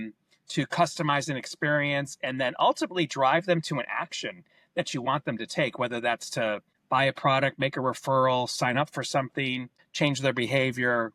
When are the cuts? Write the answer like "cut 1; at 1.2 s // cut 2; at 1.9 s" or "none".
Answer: none